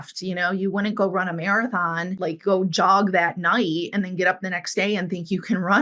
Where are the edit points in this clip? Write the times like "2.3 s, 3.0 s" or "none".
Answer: 2.1 s